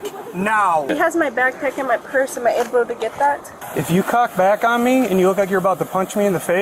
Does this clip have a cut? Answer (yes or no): yes